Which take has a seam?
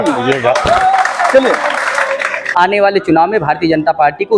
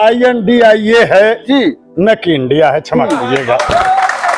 first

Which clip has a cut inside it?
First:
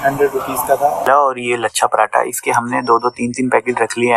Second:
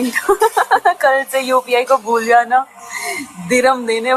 first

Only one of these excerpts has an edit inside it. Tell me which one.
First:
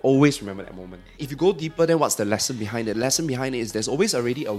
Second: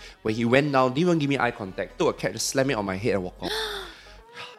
first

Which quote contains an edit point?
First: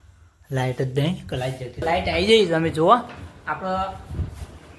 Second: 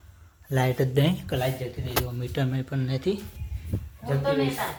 first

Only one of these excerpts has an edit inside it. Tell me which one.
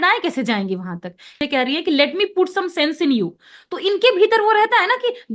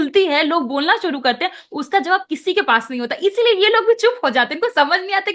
first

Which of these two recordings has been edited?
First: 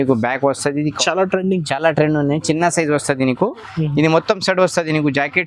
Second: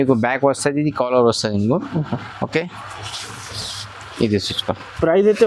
first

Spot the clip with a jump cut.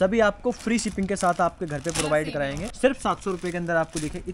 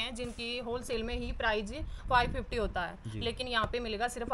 first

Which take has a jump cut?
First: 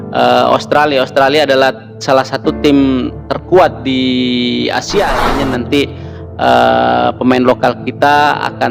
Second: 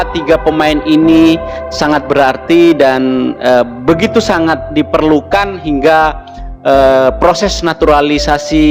first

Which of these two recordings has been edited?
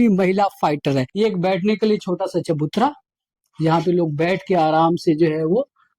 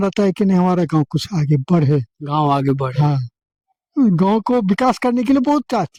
first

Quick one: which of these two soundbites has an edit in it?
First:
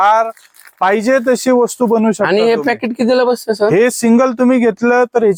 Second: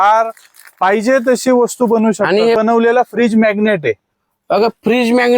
second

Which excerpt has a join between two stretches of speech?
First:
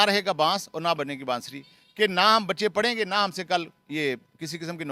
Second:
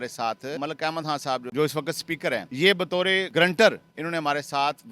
second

